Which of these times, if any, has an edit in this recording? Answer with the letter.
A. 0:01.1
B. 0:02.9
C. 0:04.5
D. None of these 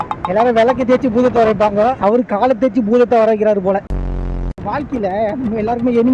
D